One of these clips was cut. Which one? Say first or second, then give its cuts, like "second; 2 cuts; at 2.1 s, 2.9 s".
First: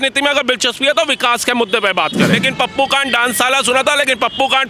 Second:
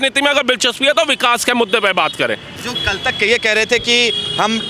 first; 1 cut; at 2.3 s